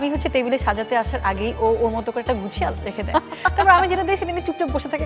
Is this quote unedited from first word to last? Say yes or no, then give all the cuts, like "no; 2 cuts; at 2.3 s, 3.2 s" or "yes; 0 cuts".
yes; 0 cuts